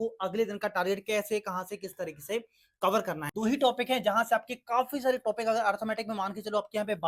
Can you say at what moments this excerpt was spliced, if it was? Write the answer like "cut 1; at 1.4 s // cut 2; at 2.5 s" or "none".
cut 1; at 3.3 s